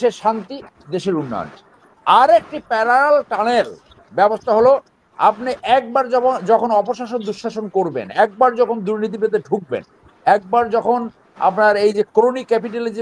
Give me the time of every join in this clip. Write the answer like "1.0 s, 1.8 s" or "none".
none